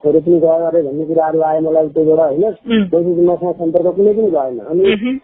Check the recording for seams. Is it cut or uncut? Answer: uncut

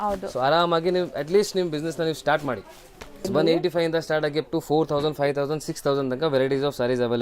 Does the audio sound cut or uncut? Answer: cut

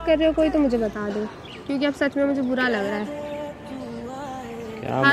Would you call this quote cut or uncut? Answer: uncut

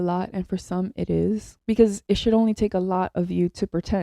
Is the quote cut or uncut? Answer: cut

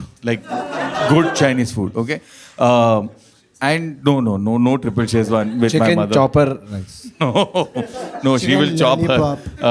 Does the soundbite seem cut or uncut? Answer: uncut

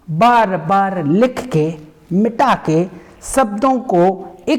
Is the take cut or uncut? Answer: uncut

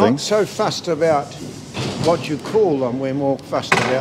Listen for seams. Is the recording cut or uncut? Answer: uncut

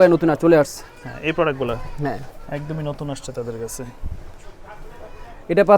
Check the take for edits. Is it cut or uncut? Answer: uncut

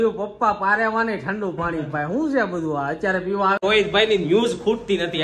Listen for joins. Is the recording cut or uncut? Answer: cut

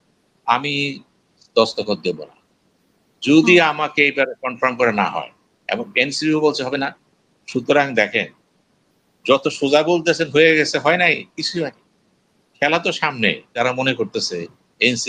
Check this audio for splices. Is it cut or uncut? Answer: cut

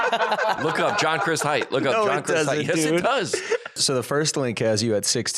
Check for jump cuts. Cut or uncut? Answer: cut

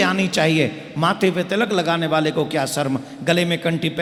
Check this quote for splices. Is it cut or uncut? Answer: uncut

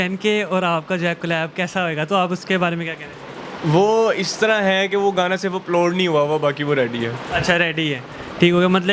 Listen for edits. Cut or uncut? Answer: uncut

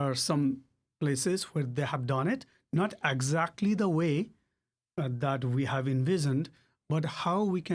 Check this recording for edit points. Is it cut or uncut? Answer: uncut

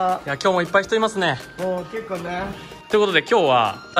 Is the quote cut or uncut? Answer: cut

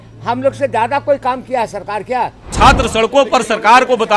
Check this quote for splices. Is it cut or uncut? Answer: cut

